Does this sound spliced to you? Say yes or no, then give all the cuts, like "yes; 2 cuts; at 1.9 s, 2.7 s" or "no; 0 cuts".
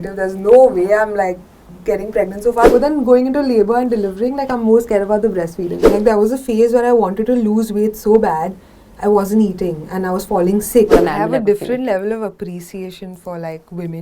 yes; 3 cuts; at 2.7 s, 5.8 s, 10.9 s